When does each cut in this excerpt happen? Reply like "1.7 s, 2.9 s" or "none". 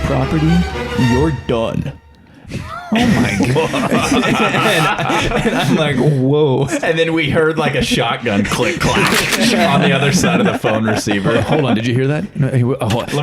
6.7 s